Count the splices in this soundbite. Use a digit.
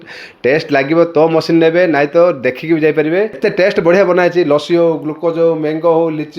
1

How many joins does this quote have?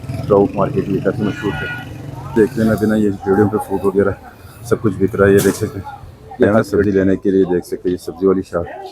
2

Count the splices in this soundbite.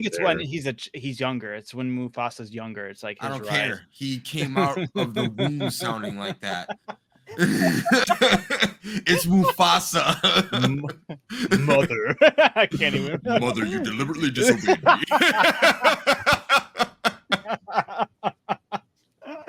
0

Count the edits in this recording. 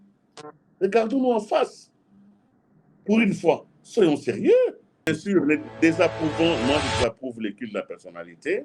1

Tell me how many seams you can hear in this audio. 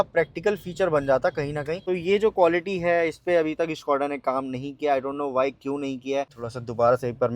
2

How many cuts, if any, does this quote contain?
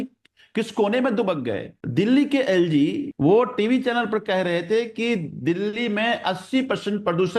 2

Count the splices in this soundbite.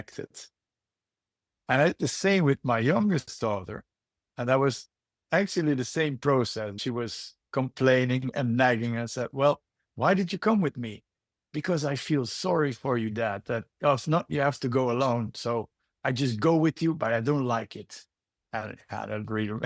1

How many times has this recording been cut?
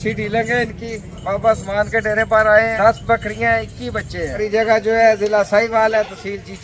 2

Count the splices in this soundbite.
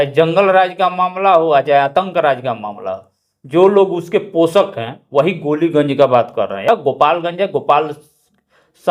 0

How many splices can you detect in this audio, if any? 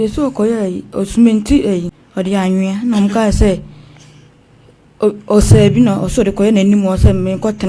1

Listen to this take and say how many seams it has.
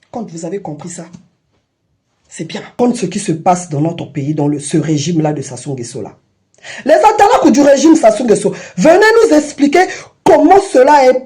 1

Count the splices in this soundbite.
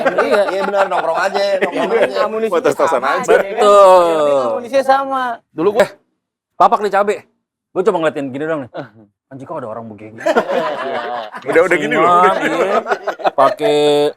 1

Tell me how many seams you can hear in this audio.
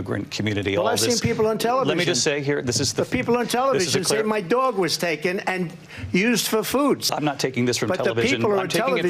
1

